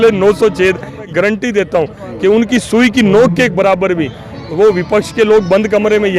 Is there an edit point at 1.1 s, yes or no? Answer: yes